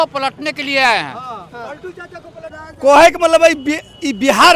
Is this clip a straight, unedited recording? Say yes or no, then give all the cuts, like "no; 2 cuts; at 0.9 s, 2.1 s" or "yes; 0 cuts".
no; 1 cut; at 2.7 s